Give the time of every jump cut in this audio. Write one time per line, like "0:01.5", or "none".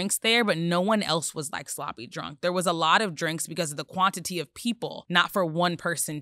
0:05.0

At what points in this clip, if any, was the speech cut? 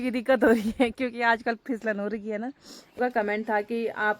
0:03.0

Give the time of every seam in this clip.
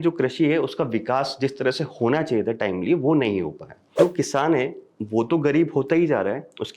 0:04.0

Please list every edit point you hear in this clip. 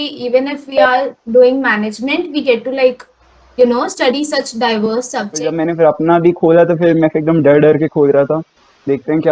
0:05.3

